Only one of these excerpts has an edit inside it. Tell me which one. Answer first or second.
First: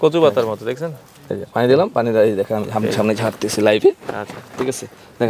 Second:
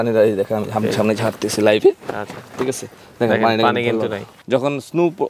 second